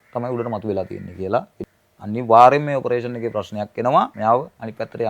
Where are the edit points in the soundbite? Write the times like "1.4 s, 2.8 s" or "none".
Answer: 1.6 s, 4.1 s